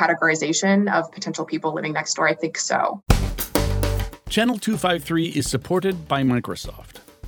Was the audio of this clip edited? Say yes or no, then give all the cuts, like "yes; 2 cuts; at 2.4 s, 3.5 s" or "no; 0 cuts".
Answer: yes; 1 cut; at 3.0 s